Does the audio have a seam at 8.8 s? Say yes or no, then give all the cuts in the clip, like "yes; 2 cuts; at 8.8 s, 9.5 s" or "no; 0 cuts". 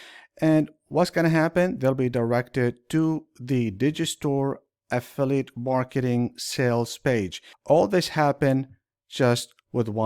no; 1 cut; at 7.5 s